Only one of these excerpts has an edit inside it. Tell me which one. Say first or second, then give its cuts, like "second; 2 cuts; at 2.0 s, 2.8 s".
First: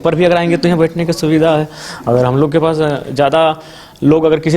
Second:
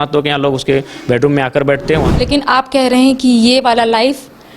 second; 1 cut; at 2.1 s